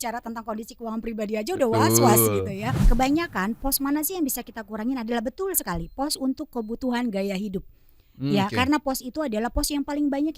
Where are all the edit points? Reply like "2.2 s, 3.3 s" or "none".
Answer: 2.8 s